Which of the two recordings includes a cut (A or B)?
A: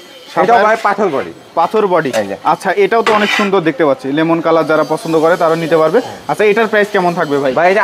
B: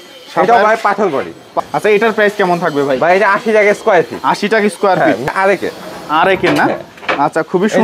B